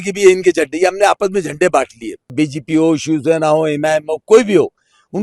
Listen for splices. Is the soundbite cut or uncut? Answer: cut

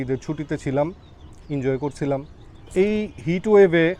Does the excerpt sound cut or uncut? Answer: cut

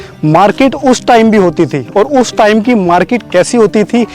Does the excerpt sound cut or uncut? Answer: uncut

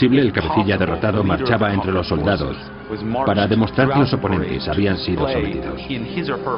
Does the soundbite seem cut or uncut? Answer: uncut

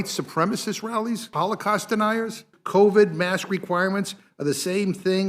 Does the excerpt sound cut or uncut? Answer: cut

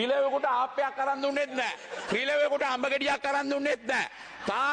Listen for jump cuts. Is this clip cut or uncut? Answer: uncut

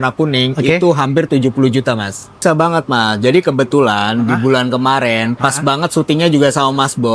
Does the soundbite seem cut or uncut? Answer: cut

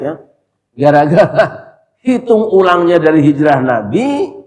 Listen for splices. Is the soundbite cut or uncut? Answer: uncut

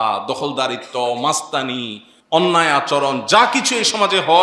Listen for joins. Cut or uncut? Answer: uncut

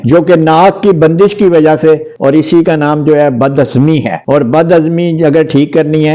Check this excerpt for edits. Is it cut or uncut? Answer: cut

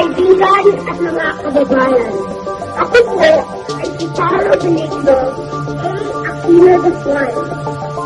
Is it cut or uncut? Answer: uncut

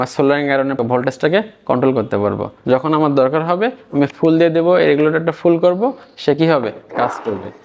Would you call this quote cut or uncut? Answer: cut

